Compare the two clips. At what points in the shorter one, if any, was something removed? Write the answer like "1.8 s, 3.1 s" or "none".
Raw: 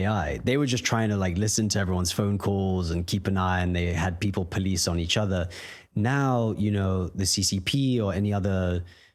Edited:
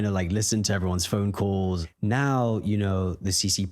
1.8 s